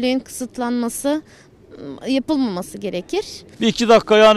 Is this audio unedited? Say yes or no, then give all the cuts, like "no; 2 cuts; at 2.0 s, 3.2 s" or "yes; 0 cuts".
no; 1 cut; at 3.4 s